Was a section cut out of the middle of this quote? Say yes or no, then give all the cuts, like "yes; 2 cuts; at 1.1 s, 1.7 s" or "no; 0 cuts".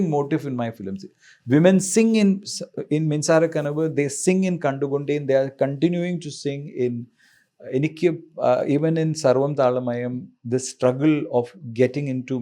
no; 0 cuts